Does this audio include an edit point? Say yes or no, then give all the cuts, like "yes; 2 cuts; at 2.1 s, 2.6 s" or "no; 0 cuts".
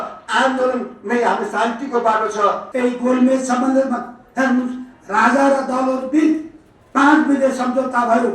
yes; 1 cut; at 2.7 s